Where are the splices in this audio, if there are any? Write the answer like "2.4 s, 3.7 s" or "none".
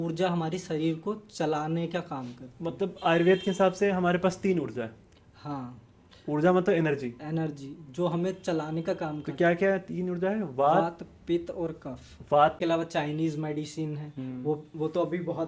12.6 s